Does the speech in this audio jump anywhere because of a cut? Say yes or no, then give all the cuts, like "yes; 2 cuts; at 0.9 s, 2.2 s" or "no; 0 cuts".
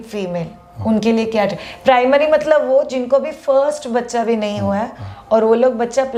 no; 0 cuts